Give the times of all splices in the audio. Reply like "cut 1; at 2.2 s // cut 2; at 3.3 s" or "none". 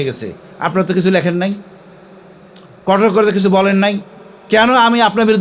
none